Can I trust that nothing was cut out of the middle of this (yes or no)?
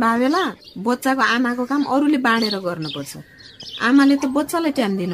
yes